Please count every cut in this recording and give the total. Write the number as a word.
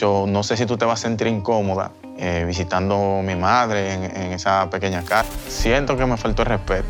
zero